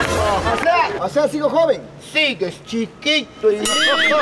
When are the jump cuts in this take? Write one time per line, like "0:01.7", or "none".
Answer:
0:01.0